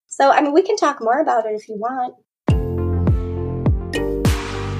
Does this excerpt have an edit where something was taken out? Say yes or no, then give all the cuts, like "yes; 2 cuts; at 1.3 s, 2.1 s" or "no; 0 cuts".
yes; 1 cut; at 2.3 s